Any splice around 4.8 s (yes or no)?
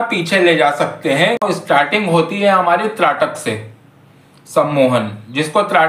no